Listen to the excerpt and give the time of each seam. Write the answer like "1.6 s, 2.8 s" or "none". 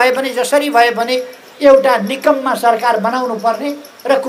none